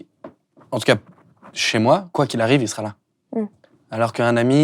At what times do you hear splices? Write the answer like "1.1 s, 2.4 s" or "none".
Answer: 2.1 s